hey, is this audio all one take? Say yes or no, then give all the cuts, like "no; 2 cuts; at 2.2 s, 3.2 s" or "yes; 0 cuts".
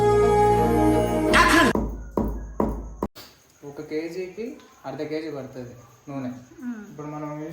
no; 1 cut; at 3.3 s